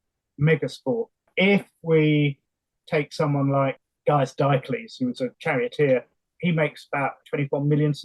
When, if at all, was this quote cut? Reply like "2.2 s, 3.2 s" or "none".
1.2 s, 3.8 s, 5.4 s, 6.2 s, 7.2 s